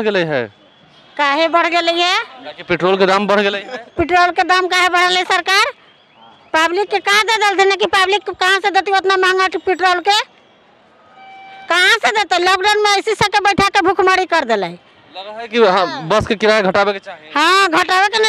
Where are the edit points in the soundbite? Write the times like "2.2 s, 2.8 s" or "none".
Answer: none